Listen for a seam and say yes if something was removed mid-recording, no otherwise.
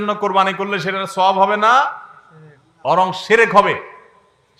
no